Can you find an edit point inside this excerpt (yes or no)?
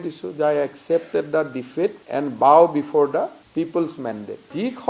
no